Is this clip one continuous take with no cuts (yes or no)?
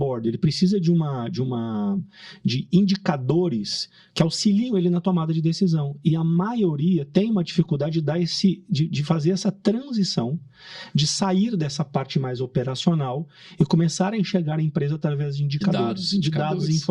yes